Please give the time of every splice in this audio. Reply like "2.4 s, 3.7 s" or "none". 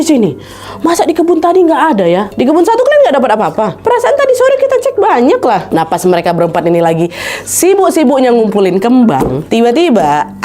2.3 s, 5.6 s, 9.4 s